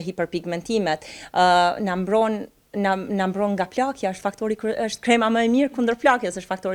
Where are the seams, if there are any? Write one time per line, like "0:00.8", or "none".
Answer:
none